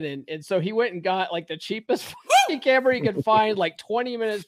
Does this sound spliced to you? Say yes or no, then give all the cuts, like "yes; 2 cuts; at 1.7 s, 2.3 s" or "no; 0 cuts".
no; 0 cuts